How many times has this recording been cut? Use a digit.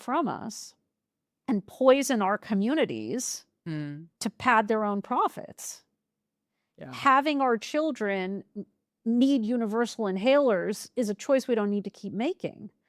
1